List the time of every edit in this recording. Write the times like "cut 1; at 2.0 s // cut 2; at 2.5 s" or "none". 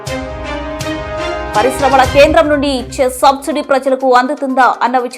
cut 1; at 1.5 s